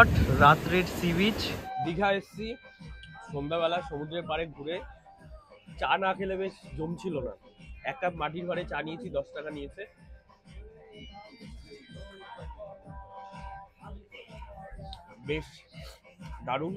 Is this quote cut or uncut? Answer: uncut